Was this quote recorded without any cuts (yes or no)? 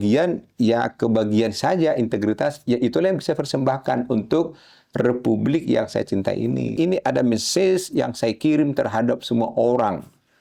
no